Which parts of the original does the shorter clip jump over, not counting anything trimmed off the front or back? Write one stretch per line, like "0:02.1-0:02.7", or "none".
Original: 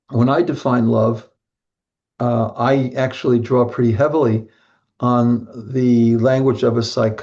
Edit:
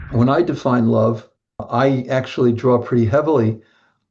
0:01.7-0:02.5